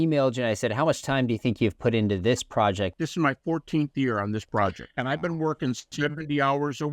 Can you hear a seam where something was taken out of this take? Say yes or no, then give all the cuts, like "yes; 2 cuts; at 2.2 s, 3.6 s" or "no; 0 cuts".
yes; 2 cuts; at 2.9 s, 4.8 s